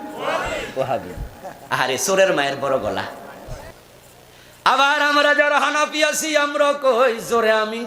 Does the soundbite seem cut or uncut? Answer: cut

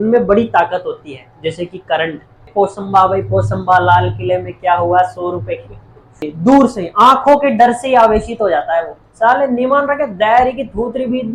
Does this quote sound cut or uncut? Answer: cut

